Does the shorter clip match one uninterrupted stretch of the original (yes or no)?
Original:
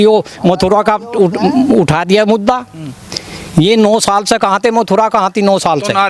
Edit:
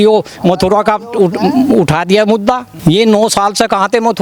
no